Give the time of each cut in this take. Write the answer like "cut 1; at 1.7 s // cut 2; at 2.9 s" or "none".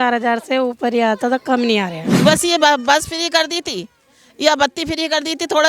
cut 1; at 2.0 s